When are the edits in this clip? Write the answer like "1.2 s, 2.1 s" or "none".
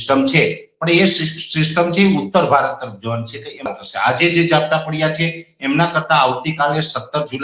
3.7 s